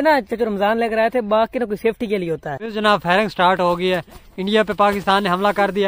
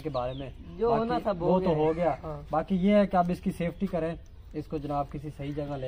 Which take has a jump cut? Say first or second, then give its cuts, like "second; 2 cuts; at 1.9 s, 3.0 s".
first; 1 cut; at 2.6 s